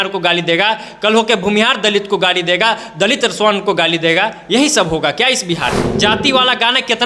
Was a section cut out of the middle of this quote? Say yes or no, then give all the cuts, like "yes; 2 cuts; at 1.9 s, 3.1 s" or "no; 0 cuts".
yes; 1 cut; at 5.9 s